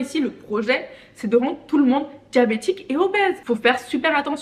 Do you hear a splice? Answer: no; 0 cuts

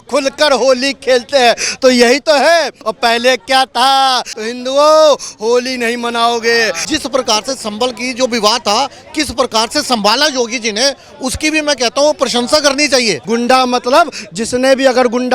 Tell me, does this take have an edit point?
yes; 4 cuts; at 2.8 s, 4.3 s, 6.8 s, 13.2 s

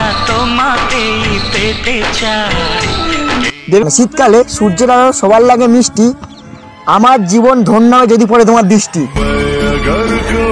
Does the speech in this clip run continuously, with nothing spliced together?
no; 1 cut; at 3.8 s

